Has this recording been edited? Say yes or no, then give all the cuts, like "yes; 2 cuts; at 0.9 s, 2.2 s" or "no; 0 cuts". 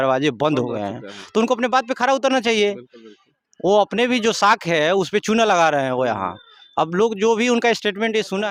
no; 0 cuts